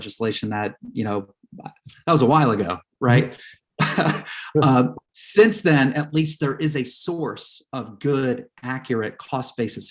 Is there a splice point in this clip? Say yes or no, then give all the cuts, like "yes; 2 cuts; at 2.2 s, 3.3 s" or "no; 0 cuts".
no; 0 cuts